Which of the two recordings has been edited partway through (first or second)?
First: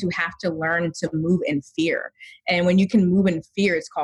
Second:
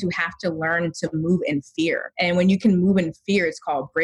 second